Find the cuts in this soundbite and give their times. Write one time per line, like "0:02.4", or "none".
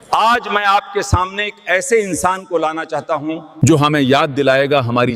0:03.5